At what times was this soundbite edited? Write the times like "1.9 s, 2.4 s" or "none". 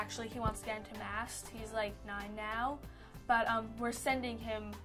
none